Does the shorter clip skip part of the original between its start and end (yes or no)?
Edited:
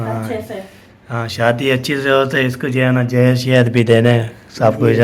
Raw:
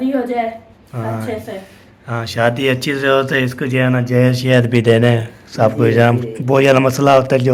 no